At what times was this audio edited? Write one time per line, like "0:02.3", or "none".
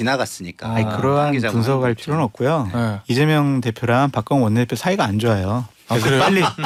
none

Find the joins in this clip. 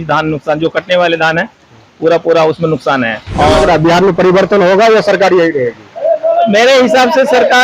0:03.2

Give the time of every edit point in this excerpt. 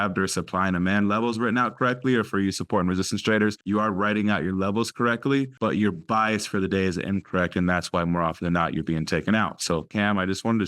0:03.6
0:05.5
0:09.9

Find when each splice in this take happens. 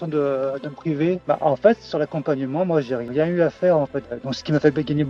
0:01.2
0:03.1
0:04.0

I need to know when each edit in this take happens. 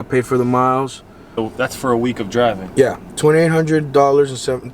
0:01.3

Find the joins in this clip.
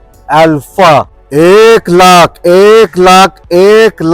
0:01.2

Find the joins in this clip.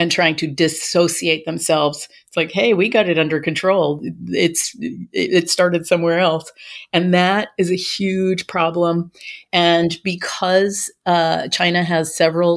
none

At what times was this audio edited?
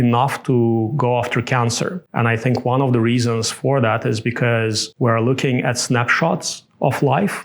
0:02.0
0:04.8

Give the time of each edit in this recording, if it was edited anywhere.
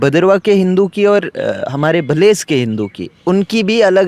none

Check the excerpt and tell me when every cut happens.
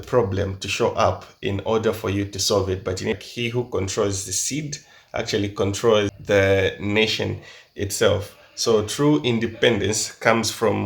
0:03.2
0:06.2

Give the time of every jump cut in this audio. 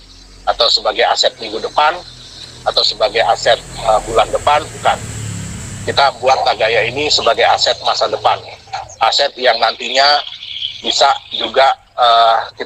none

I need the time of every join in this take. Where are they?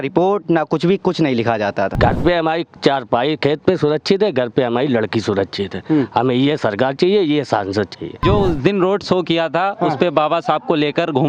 0:01.9
0:08.2

